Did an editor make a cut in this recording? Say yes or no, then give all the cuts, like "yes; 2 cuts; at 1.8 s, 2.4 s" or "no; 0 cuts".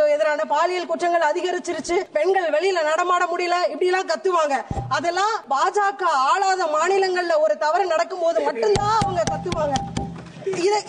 yes; 2 cuts; at 2.1 s, 5.4 s